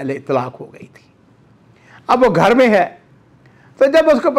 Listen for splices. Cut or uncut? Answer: uncut